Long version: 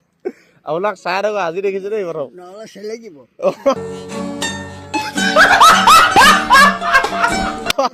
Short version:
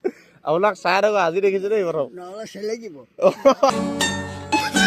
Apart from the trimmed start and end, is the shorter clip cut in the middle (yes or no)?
yes